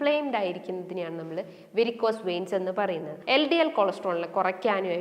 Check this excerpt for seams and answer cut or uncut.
cut